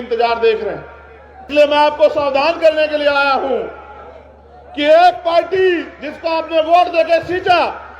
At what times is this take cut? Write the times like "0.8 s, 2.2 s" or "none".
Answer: 1.4 s